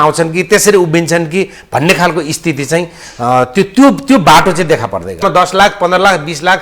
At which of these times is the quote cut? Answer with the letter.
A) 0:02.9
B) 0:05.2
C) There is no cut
B